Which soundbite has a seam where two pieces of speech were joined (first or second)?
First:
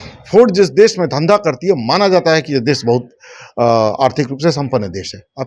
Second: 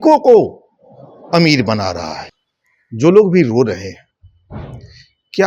second